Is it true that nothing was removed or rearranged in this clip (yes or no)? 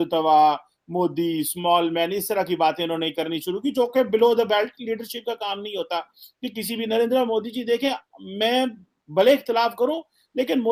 yes